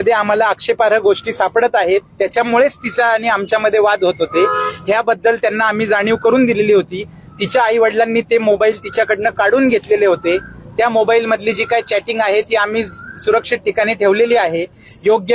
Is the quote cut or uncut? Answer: uncut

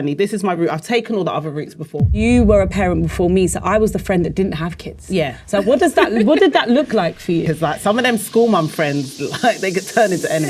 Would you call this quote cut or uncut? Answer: cut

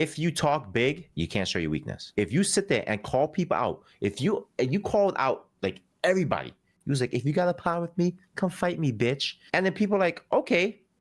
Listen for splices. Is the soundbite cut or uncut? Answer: cut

